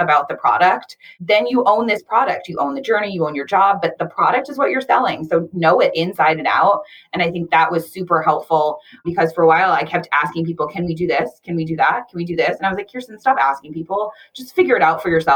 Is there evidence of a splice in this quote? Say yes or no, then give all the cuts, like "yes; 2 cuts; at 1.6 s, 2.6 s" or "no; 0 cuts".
yes; 1 cut; at 1.1 s